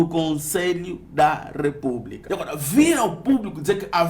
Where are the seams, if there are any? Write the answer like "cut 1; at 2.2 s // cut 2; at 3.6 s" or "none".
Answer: cut 1; at 2.1 s